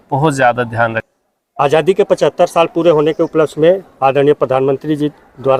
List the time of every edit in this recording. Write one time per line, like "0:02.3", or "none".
0:01.1